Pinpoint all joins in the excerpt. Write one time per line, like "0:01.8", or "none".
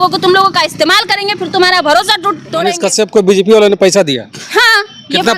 0:02.6

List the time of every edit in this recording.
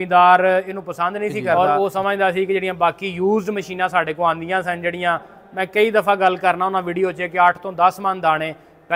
0:01.5

